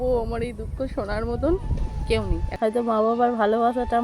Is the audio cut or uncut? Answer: cut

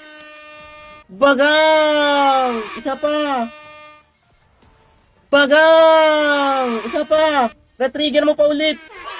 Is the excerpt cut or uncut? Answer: cut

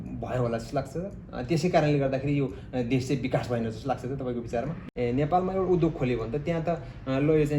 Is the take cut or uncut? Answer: cut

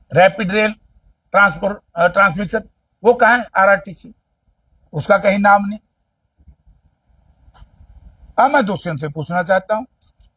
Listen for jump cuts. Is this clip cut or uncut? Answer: uncut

